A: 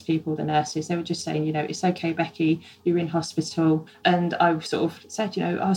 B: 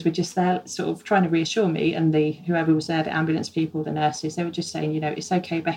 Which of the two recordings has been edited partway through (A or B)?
A